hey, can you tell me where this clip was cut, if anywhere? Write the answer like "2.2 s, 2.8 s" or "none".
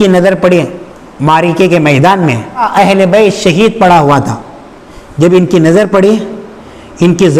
2.7 s